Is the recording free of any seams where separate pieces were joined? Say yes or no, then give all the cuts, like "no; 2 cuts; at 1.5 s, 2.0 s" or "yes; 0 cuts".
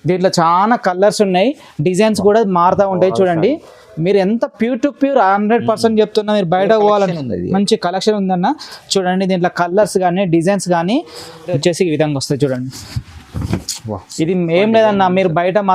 no; 1 cut; at 11.6 s